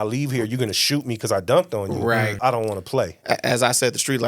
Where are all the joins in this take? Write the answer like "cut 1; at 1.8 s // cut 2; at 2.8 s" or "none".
cut 1; at 2.4 s